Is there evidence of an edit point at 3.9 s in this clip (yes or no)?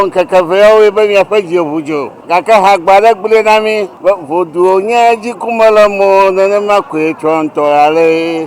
yes